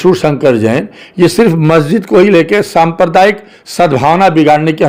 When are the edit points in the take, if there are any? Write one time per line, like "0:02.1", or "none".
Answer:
none